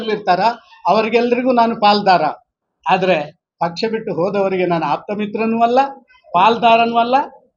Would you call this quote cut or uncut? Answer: uncut